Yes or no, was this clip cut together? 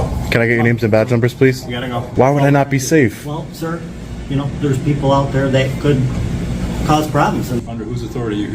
yes